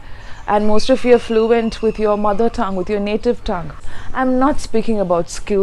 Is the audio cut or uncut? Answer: uncut